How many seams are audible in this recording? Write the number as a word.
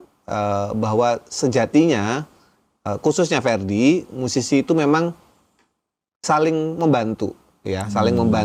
zero